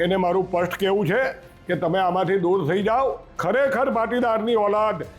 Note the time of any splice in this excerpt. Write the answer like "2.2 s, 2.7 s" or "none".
3.3 s